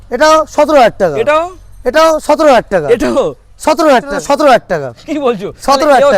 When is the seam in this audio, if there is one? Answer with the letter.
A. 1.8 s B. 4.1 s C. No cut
B